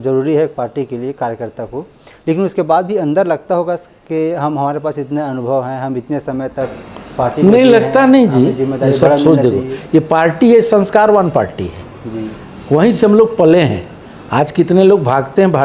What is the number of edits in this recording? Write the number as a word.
zero